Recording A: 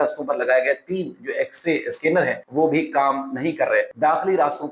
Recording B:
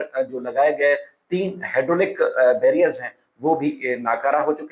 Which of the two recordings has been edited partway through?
A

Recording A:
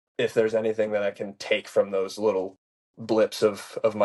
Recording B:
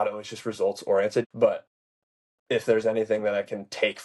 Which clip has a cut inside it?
B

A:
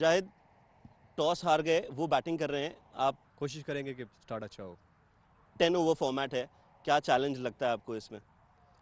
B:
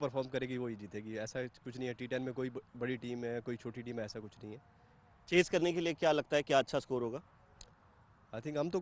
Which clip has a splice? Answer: A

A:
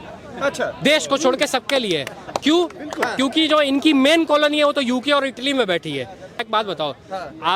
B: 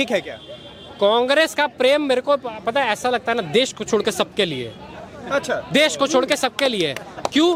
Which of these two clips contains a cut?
A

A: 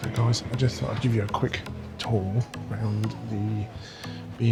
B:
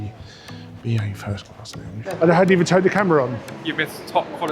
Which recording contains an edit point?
B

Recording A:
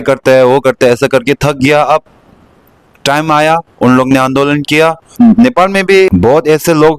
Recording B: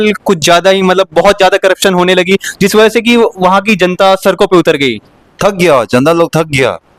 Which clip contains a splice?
A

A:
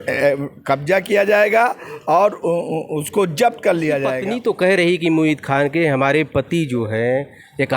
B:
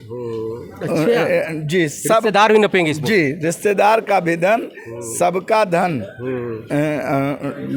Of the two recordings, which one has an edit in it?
A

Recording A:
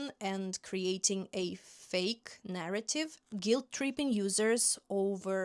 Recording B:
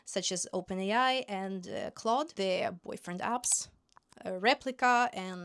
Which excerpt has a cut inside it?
B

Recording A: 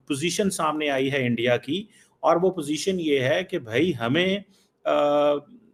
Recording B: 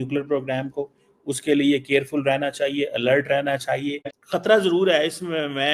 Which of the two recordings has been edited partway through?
B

